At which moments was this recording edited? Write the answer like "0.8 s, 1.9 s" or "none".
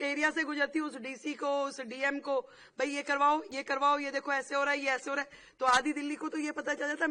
none